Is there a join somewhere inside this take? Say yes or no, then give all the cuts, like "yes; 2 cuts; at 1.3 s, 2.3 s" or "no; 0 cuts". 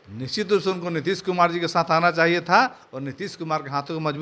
no; 0 cuts